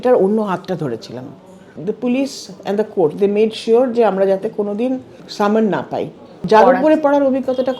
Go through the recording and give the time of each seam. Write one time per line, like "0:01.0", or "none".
0:01.8
0:05.2
0:06.3

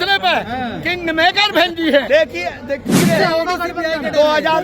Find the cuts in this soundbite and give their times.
0:02.1

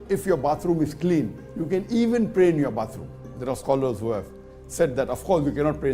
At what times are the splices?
none

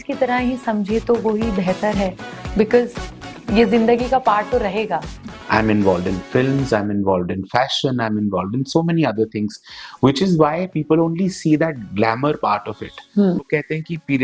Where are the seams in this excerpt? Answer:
0:05.3
0:13.4

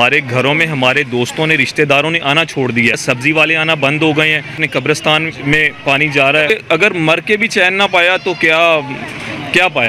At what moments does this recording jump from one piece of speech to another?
0:03.0
0:04.6
0:06.5

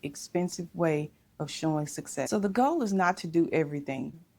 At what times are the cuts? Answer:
none

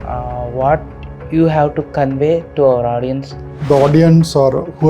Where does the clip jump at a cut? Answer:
0:03.5

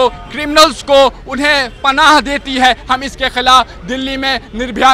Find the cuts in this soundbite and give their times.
none

